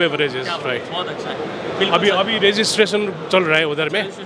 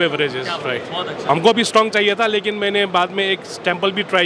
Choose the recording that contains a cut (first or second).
second